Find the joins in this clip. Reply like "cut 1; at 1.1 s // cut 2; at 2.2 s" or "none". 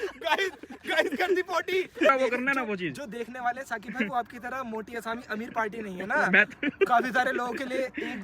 cut 1; at 2.1 s